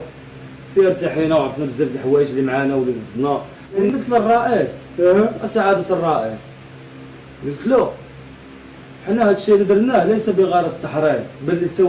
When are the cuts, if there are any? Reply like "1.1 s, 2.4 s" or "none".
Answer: 3.9 s